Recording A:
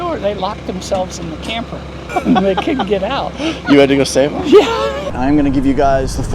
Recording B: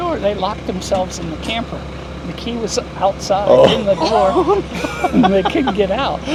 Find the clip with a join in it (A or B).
A